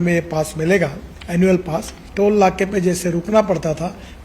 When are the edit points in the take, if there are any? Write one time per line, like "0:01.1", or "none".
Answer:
0:02.0